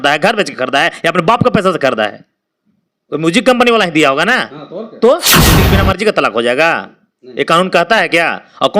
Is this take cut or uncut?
cut